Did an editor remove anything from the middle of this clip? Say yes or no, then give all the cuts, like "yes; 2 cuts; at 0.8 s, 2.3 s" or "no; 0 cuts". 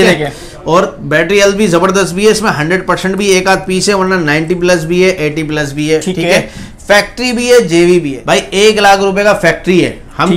yes; 1 cut; at 8.2 s